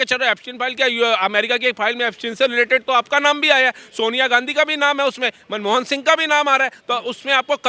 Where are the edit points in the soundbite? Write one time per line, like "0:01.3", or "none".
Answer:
none